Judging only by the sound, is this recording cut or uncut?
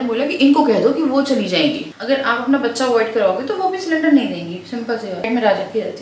cut